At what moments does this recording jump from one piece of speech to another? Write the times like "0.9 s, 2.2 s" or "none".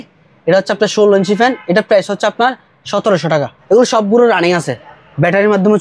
3.5 s